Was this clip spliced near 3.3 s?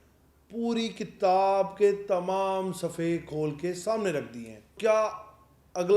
no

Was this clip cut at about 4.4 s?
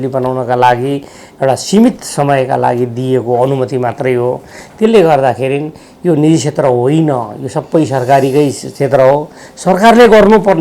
no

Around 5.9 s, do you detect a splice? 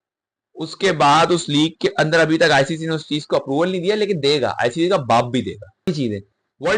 yes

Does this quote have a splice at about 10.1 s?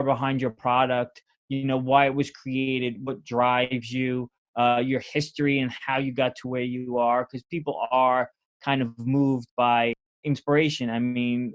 yes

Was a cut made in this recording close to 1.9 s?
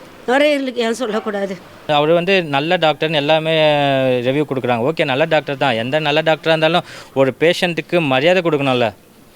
yes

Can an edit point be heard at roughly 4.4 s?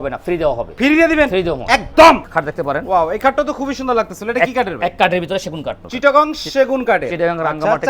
no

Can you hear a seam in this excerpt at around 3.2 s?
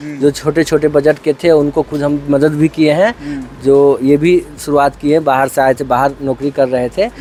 no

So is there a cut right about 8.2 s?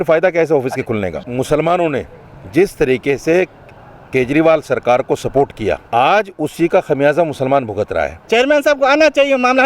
yes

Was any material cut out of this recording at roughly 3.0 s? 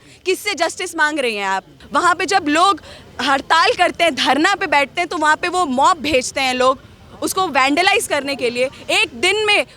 no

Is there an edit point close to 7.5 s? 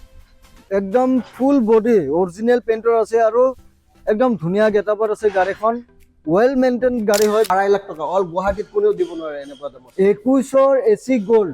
yes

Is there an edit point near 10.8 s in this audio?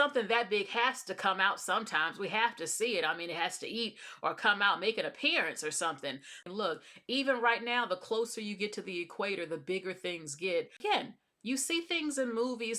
yes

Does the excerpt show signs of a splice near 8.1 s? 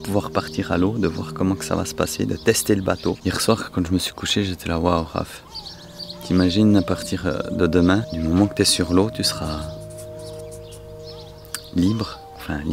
yes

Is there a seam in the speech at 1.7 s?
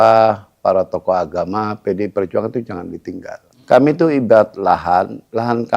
no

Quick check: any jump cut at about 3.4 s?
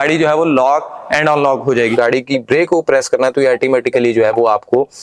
no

